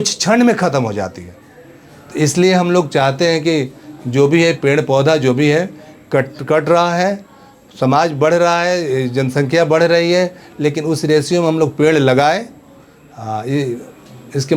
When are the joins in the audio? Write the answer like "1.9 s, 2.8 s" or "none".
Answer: none